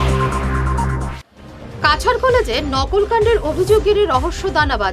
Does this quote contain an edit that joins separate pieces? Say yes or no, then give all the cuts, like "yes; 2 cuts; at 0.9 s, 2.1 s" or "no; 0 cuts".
no; 0 cuts